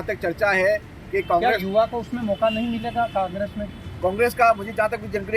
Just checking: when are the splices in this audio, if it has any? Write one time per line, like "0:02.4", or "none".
none